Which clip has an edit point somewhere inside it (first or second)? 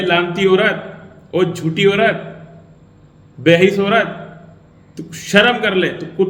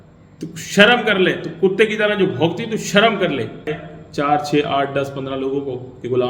second